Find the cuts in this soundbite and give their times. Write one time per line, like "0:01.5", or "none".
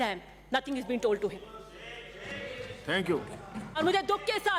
none